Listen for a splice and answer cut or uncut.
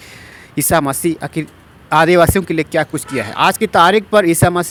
uncut